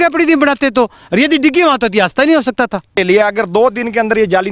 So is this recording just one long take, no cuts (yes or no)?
no